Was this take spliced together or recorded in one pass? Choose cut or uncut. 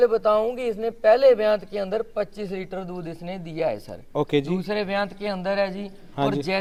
uncut